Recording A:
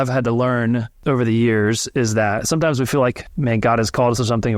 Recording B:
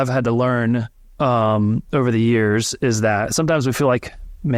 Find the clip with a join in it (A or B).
A